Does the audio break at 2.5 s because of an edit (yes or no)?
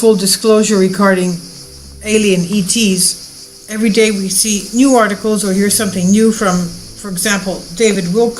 yes